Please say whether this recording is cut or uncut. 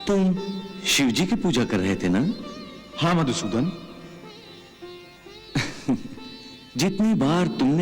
uncut